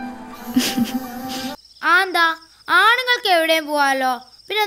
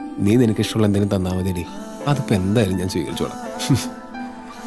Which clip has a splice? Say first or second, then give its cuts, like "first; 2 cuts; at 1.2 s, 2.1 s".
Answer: first; 1 cut; at 1.6 s